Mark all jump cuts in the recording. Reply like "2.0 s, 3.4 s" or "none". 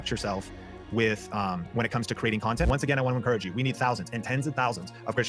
2.7 s

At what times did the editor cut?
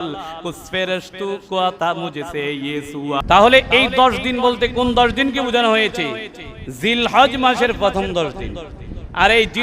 3.2 s

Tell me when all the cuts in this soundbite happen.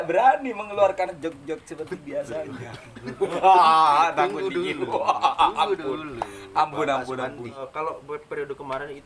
7.6 s

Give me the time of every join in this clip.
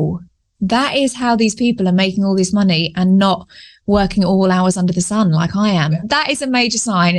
6.0 s

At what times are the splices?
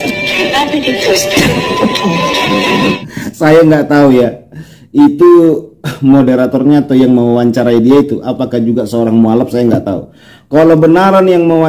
3.0 s

